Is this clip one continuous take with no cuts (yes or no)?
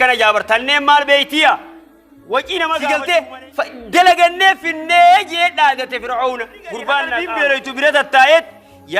no